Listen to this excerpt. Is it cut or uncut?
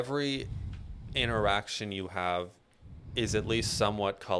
uncut